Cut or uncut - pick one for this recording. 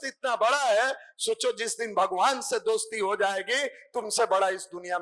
uncut